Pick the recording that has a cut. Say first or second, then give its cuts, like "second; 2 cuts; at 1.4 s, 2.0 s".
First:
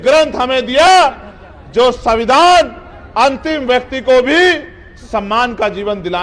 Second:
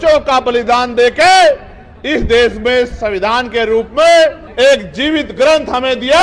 second; 1 cut; at 4.4 s